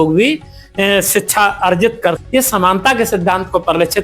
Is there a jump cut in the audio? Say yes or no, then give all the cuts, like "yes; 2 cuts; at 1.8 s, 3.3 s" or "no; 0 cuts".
yes; 1 cut; at 2.2 s